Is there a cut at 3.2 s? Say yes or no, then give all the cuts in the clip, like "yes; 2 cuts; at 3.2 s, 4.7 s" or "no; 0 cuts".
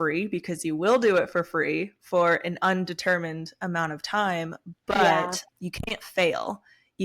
no; 1 cut; at 5.4 s